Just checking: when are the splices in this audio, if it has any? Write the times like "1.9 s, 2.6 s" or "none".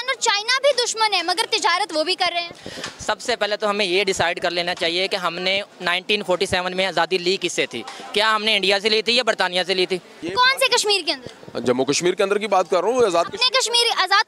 10.2 s